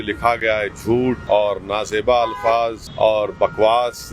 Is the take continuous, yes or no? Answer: no